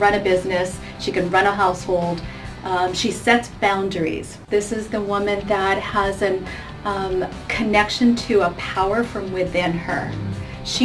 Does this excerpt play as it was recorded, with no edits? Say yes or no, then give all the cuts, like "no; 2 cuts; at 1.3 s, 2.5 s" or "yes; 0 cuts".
no; 1 cut; at 4.3 s